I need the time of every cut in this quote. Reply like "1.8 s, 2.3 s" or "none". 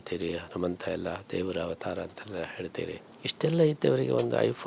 3.1 s